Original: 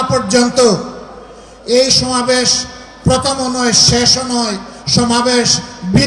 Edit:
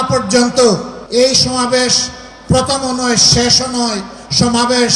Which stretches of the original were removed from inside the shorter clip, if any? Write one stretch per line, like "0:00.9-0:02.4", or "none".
0:01.0-0:01.5